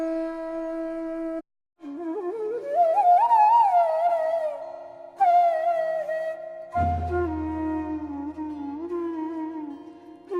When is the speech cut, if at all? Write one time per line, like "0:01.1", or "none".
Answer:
none